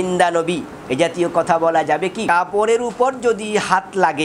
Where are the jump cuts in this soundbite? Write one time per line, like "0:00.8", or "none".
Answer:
0:02.2